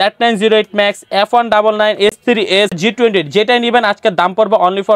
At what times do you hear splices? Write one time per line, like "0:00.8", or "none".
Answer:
none